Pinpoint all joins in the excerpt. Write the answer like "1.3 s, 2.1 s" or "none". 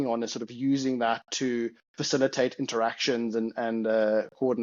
none